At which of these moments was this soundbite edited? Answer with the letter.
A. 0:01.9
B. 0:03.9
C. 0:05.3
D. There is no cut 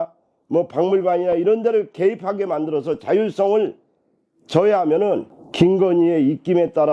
C